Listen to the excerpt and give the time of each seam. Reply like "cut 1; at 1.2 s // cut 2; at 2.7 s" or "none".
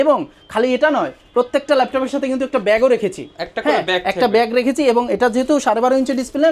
none